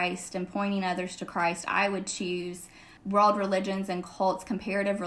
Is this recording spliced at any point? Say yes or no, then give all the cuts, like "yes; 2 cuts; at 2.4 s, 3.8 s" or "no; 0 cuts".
yes; 1 cut; at 2.9 s